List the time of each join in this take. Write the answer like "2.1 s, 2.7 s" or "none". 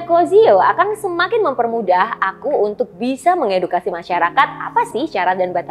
none